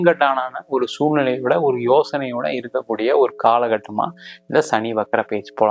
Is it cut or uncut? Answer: uncut